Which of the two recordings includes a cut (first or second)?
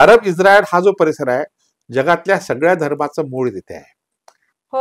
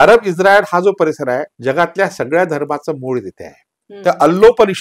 second